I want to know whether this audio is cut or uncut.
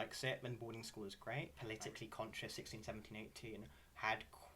cut